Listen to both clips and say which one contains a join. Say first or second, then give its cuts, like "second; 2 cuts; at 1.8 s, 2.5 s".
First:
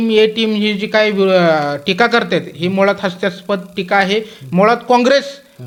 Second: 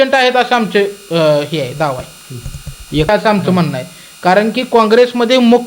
second; 1 cut; at 3.1 s